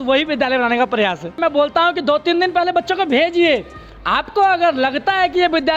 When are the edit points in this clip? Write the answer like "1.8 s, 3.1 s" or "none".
1.4 s